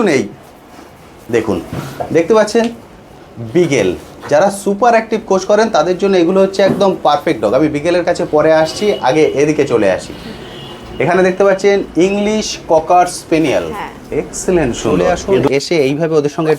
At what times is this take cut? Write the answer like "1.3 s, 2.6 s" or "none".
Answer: 15.3 s